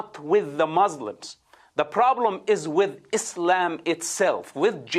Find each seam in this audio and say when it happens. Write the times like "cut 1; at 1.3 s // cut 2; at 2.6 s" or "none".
none